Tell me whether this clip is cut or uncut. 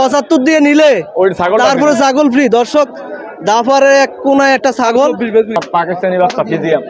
cut